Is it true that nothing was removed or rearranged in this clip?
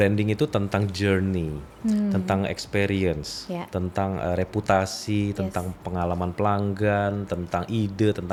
yes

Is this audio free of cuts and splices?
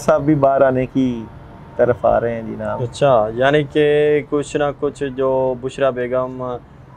yes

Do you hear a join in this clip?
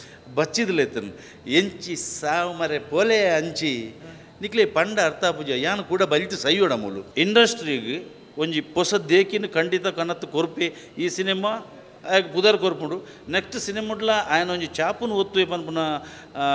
yes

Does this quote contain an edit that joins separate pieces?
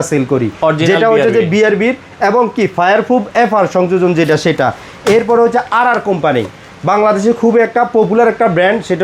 no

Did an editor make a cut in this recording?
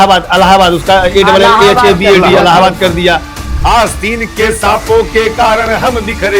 yes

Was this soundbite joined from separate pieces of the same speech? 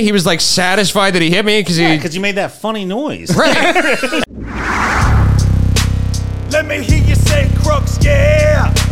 yes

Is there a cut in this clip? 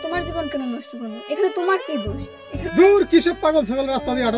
yes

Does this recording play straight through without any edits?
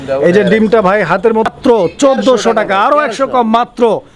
no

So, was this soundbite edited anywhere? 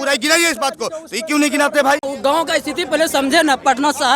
yes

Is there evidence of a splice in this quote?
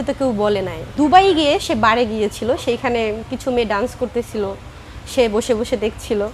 yes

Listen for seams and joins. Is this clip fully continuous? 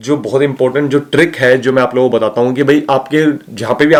yes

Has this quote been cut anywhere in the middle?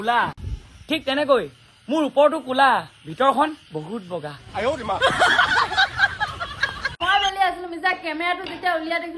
yes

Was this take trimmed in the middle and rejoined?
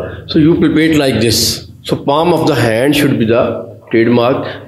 no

